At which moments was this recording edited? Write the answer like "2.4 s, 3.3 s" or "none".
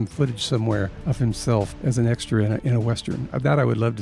1.0 s, 1.7 s